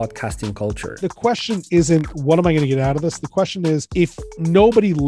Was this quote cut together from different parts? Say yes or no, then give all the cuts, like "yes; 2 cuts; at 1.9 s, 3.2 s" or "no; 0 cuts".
yes; 2 cuts; at 0.9 s, 3.9 s